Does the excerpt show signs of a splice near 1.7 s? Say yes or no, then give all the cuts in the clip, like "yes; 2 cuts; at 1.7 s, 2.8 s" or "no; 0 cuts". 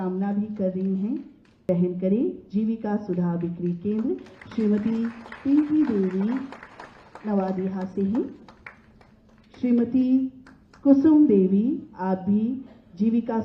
yes; 1 cut; at 1.7 s